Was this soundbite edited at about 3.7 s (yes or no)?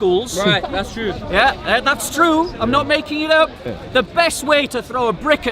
yes